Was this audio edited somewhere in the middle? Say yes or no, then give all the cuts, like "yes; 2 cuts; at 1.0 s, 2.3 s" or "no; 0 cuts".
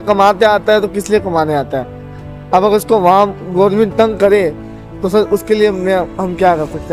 no; 0 cuts